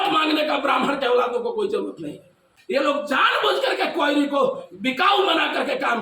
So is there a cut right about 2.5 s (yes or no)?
yes